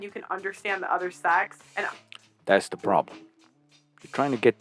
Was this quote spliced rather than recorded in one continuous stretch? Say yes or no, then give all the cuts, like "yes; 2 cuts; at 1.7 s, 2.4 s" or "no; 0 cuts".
no; 0 cuts